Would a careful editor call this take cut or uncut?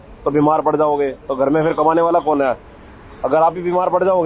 uncut